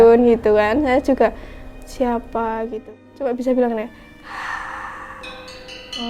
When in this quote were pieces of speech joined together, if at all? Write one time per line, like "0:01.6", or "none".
0:02.7